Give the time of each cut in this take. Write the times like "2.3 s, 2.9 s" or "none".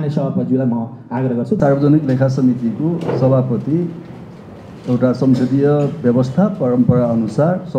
1.6 s